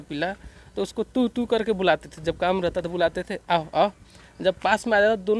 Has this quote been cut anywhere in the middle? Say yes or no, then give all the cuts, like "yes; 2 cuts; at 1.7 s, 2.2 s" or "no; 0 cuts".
no; 0 cuts